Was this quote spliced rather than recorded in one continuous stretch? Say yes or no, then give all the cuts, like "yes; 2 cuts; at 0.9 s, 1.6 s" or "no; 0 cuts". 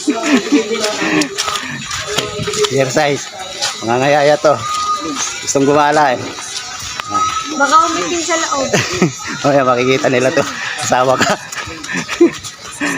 no; 0 cuts